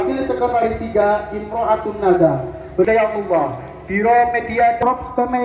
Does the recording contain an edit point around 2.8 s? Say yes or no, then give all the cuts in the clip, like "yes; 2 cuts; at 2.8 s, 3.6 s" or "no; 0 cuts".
yes; 1 cut; at 2.8 s